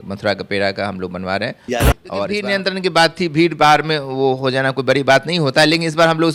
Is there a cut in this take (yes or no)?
yes